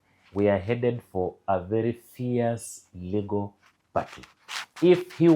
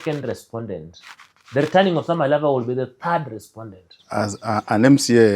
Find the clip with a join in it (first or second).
second